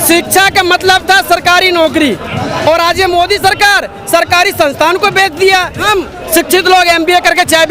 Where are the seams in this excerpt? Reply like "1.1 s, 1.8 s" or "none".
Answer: 5.8 s